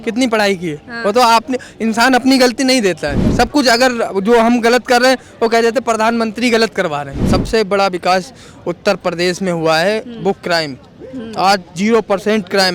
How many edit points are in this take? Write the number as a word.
one